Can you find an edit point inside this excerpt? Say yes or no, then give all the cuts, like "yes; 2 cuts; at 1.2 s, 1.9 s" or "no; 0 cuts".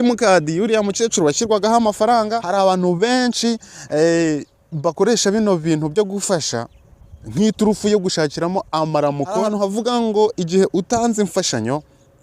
yes; 2 cuts; at 2.4 s, 9.4 s